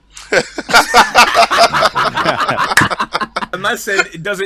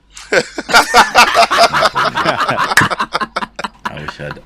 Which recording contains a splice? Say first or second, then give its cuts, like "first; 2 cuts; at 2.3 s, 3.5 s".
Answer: first; 1 cut; at 3.5 s